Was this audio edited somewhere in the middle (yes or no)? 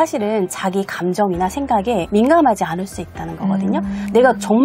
yes